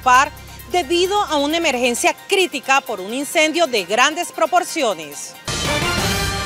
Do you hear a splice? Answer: yes; 1 cut; at 5.5 s

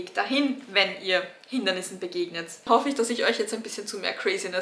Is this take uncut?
no; 1 cut; at 2.6 s

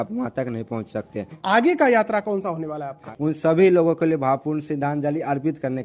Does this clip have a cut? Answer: yes; 2 cuts; at 1.2 s, 3.0 s

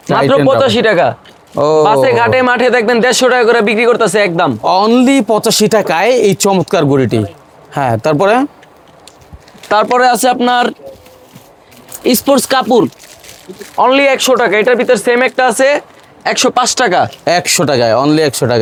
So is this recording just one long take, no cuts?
yes; 0 cuts

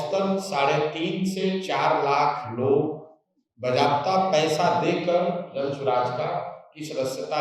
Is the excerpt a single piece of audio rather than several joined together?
yes; 0 cuts

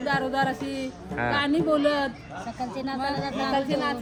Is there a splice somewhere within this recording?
no; 0 cuts

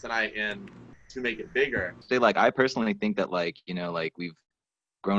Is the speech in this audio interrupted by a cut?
yes; 1 cut; at 2.0 s

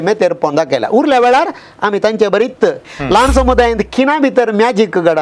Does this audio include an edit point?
yes; 1 cut; at 2.8 s

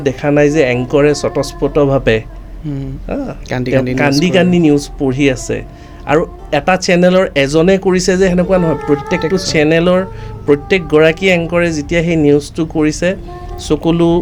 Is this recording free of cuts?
yes; 0 cuts

